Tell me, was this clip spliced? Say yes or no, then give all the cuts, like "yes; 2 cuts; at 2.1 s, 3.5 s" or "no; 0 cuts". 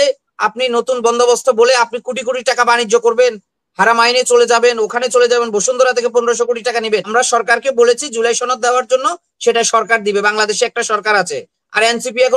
yes; 1 cut; at 7.1 s